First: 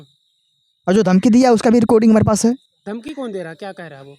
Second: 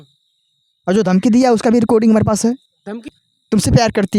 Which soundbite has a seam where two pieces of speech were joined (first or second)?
second